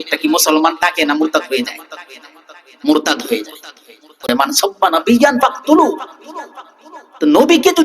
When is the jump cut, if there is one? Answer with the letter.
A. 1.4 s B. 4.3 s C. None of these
B